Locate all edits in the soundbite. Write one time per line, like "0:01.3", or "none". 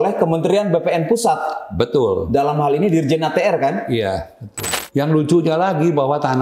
0:04.7